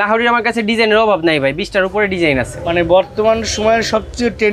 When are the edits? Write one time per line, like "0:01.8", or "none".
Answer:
none